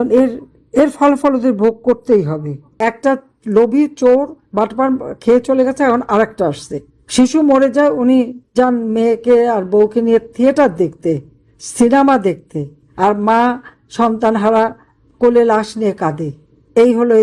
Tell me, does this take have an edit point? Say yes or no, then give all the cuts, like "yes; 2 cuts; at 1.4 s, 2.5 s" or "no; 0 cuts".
yes; 1 cut; at 2.8 s